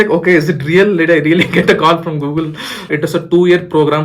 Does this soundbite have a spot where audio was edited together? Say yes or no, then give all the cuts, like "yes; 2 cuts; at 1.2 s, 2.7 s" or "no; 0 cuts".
yes; 1 cut; at 2.9 s